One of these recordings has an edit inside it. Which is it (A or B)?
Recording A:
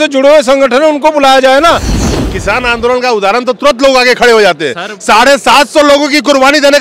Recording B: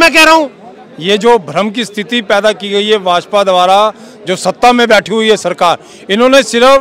A